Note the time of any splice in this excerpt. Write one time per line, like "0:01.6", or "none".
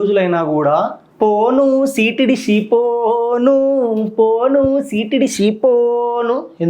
0:01.0